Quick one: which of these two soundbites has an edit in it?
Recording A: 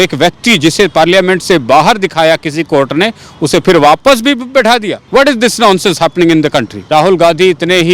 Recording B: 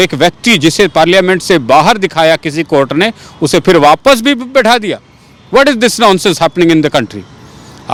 A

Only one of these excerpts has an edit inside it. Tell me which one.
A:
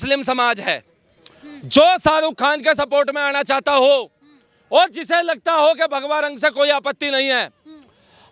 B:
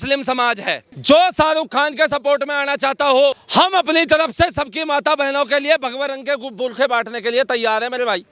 B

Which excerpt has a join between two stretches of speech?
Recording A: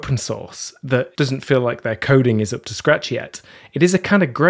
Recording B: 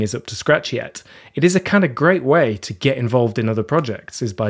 A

